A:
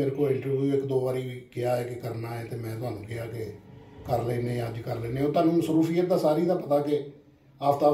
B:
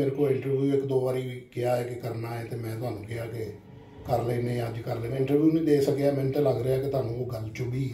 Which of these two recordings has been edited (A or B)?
B